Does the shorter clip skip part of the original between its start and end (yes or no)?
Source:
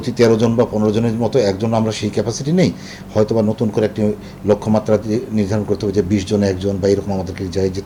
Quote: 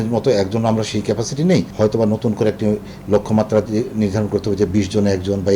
yes